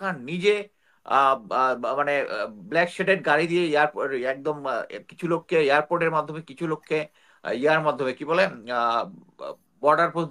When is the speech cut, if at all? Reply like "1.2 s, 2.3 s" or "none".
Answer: none